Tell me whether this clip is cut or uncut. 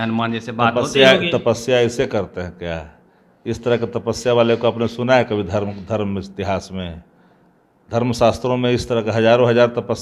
uncut